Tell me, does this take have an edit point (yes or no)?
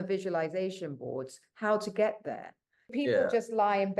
yes